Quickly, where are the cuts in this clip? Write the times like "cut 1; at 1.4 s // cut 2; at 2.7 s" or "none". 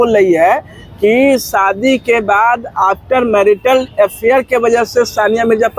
none